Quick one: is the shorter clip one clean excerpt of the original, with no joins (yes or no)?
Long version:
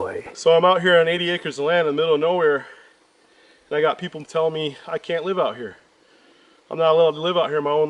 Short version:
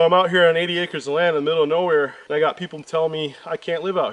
no